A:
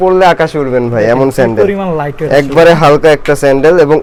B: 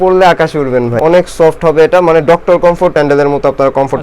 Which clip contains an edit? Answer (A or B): B